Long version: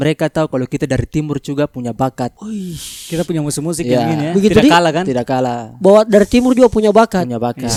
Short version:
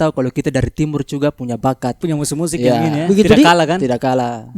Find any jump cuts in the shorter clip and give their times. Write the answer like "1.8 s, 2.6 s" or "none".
2.0 s